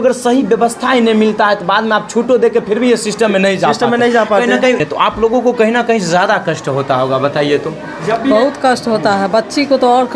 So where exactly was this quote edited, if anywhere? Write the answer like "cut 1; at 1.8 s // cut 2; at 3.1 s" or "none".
cut 1; at 4.8 s